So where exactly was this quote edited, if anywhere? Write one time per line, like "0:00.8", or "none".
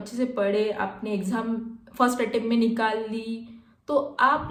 none